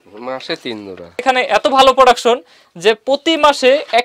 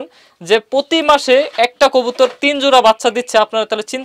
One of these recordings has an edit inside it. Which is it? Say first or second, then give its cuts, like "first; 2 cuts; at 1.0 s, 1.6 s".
first; 1 cut; at 1.2 s